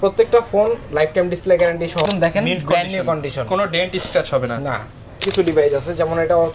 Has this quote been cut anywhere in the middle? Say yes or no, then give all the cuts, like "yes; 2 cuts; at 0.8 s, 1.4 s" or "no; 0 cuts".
yes; 2 cuts; at 2.1 s, 5.3 s